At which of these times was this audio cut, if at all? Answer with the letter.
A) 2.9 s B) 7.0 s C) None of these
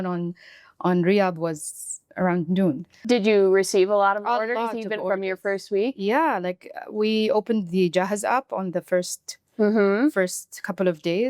A